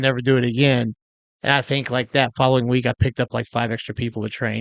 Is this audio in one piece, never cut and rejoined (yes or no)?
yes